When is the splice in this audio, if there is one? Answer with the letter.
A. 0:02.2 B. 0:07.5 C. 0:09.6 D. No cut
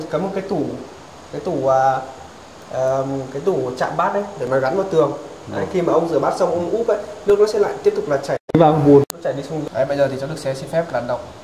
C